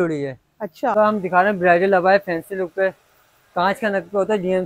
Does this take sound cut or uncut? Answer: cut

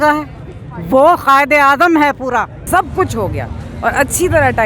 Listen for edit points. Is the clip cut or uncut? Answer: cut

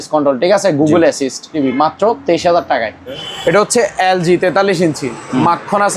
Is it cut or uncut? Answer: cut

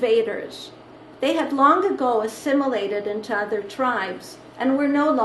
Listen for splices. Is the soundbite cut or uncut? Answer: uncut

